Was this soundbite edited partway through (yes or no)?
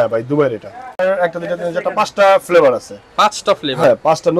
yes